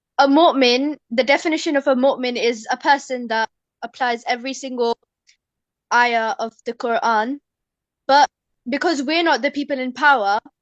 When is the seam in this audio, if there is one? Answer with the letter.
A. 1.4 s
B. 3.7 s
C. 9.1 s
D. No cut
B